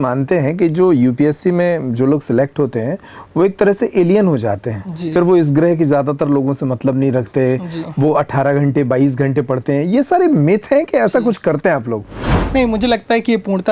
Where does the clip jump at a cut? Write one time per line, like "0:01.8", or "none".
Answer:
none